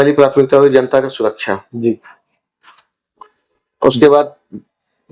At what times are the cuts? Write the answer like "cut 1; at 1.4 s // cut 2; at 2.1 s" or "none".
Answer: none